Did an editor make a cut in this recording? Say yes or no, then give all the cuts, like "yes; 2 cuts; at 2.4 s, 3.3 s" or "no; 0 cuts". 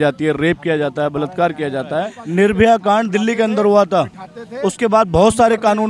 yes; 1 cut; at 2.2 s